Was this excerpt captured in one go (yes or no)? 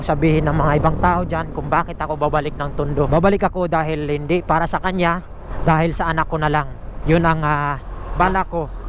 yes